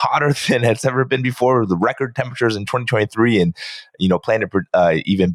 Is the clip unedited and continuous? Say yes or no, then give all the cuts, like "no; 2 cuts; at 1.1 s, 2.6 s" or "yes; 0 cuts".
yes; 0 cuts